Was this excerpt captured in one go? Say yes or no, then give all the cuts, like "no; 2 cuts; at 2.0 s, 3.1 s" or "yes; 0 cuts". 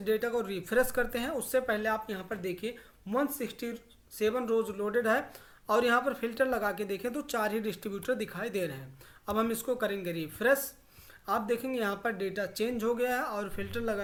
yes; 0 cuts